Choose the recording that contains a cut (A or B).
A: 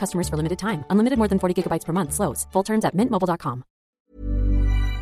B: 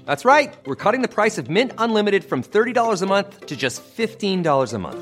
A